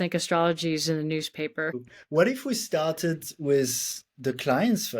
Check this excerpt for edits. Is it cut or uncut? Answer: cut